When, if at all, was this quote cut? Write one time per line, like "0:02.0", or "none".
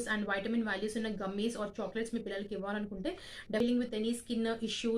0:03.6